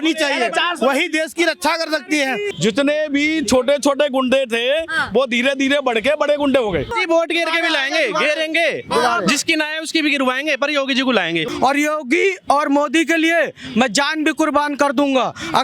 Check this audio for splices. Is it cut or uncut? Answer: cut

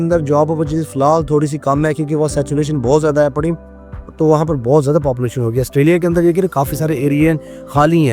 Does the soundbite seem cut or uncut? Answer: uncut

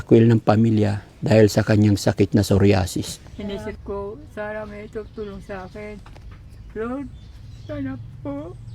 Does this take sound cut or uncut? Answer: cut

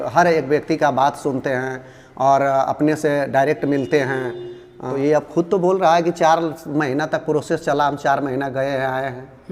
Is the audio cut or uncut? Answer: cut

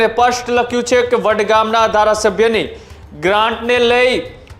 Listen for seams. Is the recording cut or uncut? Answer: uncut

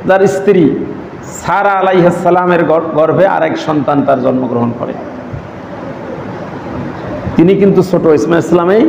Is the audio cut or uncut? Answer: uncut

